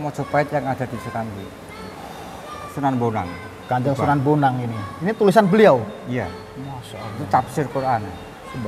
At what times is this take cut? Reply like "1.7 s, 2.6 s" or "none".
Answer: 2.6 s